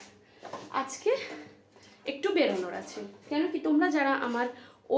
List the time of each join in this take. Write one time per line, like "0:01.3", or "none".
none